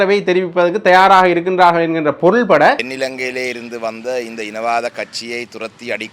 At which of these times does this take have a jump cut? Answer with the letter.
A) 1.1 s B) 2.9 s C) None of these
B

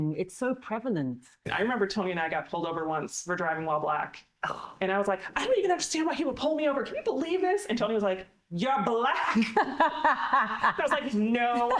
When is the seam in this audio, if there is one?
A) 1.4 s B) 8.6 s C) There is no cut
A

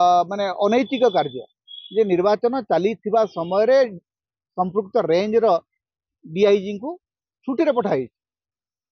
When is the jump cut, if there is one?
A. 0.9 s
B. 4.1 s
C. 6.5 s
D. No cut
D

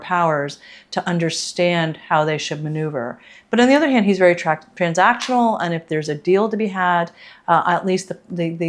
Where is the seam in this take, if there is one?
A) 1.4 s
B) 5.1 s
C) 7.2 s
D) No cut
D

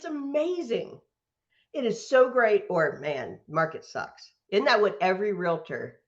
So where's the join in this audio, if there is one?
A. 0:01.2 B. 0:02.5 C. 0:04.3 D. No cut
C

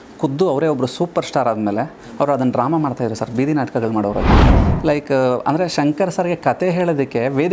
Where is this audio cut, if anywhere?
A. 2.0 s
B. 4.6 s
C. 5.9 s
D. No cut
B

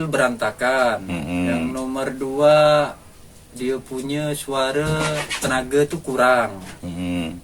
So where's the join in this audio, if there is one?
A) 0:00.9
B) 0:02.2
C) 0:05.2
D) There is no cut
D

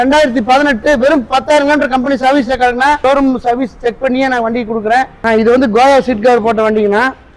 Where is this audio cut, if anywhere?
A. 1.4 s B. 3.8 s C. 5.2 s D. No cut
C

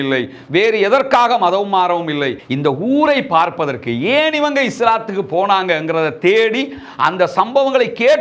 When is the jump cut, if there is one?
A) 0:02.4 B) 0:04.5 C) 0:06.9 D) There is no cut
A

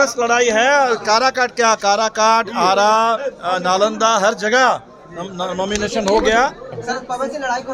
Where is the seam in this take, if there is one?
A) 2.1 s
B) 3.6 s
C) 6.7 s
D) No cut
C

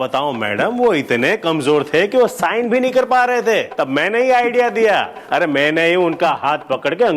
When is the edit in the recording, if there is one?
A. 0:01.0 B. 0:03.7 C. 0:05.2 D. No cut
B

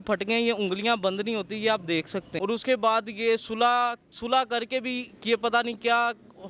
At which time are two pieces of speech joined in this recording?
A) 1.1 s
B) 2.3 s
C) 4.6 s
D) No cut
B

